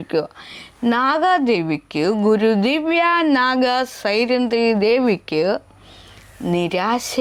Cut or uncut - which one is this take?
uncut